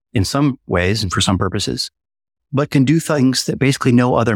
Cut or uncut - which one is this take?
uncut